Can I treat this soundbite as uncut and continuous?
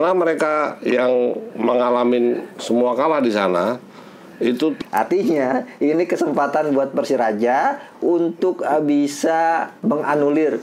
no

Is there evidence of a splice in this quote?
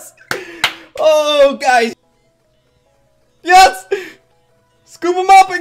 yes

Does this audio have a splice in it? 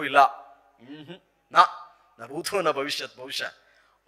no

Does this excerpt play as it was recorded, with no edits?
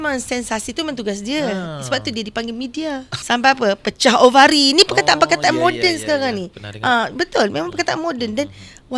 no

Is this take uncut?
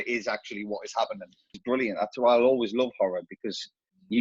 no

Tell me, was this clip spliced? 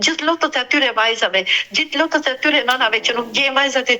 no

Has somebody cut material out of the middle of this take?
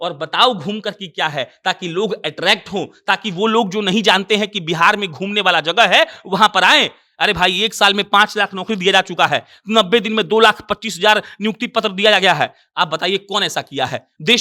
no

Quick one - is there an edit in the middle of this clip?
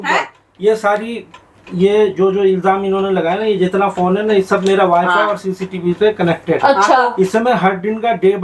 no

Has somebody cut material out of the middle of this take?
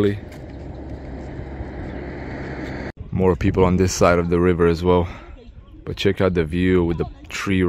no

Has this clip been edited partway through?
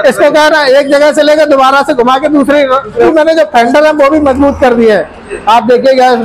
yes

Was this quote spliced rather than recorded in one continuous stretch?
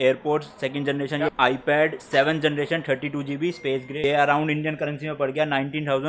yes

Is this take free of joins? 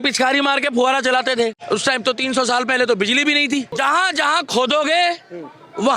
no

